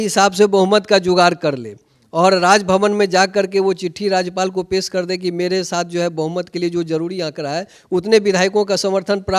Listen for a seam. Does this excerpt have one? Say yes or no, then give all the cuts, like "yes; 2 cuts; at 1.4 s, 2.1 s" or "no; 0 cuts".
no; 0 cuts